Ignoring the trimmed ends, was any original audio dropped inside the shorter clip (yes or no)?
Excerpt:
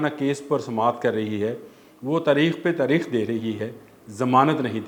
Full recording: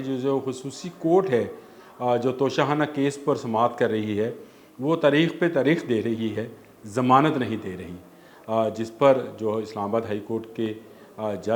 no